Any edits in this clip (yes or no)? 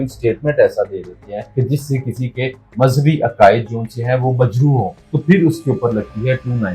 yes